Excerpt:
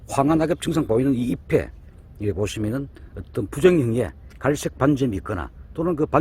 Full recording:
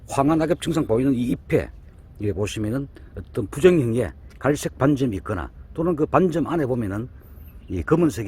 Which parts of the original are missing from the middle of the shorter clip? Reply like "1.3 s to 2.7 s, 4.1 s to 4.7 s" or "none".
none